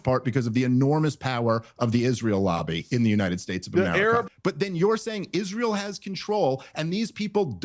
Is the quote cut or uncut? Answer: cut